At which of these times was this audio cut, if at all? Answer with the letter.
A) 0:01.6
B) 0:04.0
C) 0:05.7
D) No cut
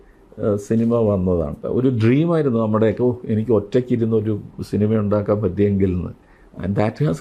A